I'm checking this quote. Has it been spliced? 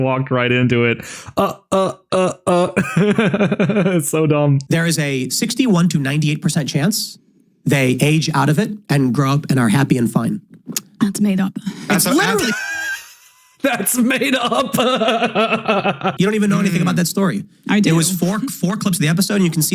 yes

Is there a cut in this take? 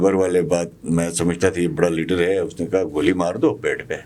no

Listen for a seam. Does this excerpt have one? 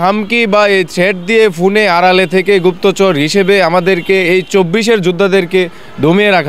no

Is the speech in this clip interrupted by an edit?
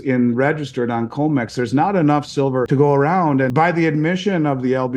yes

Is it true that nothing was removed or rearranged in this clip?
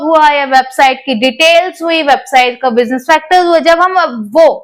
yes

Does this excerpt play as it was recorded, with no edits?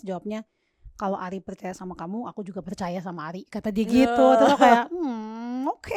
yes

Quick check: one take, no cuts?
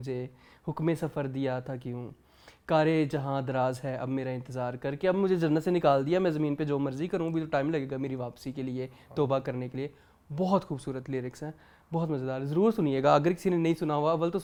yes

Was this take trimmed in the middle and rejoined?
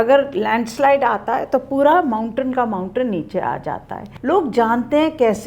yes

